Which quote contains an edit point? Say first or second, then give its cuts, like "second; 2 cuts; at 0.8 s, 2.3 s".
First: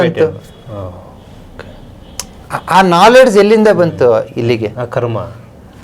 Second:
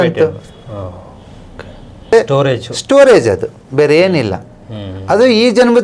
second; 1 cut; at 2.1 s